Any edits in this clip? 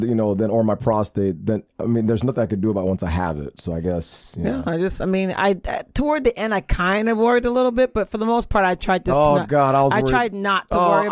no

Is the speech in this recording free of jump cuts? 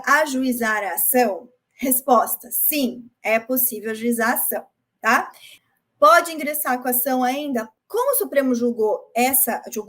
no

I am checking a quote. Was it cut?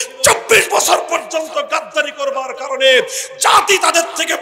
no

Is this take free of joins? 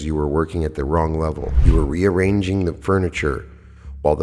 no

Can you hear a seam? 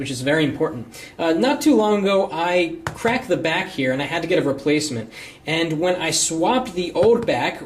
yes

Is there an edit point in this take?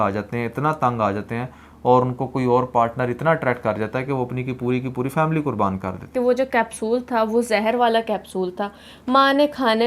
yes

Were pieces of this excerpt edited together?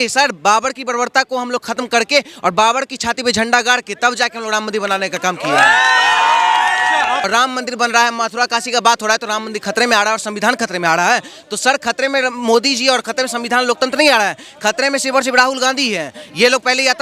yes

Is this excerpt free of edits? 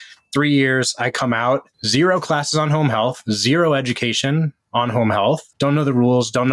no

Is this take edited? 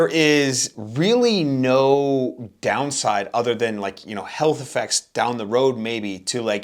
no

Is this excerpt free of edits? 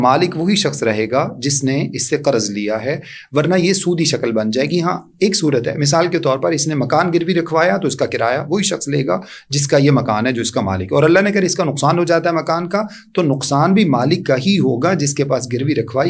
yes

